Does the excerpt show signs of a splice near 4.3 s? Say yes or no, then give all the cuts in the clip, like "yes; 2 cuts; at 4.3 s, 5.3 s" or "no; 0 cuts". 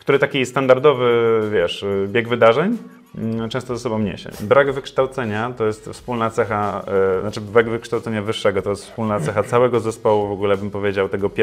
yes; 1 cut; at 4.3 s